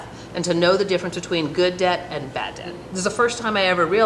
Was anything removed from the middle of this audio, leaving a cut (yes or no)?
yes